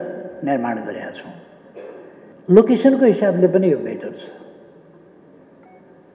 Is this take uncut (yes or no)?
no